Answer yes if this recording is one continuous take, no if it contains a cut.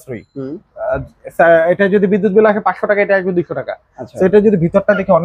yes